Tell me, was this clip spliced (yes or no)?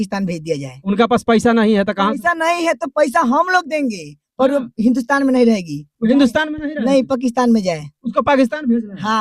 no